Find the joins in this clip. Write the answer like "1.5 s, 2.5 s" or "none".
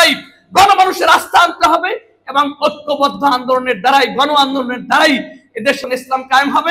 5.8 s